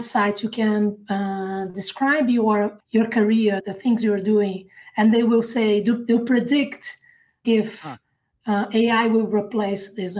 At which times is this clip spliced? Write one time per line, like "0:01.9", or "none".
0:02.8
0:03.7
0:07.4

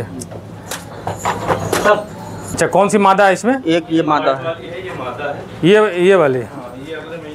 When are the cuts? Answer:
0:02.5

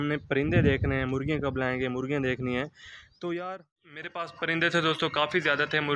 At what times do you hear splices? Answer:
0:04.2

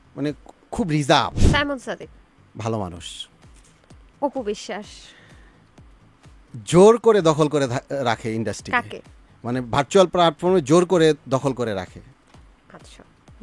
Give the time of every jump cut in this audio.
0:01.4

